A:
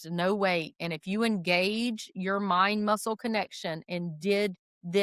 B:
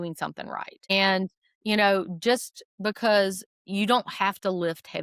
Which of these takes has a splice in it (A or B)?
B